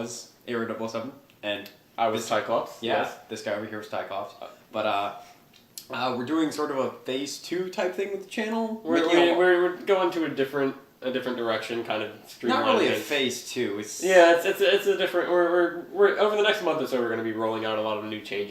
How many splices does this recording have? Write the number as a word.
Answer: one